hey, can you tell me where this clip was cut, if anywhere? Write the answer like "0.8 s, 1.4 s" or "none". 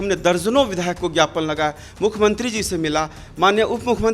none